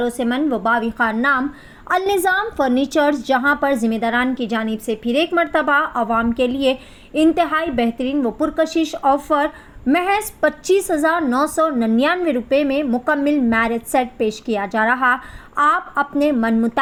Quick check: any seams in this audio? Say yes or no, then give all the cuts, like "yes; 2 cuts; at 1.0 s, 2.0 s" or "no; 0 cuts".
no; 0 cuts